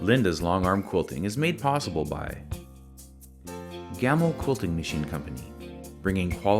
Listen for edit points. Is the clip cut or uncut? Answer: uncut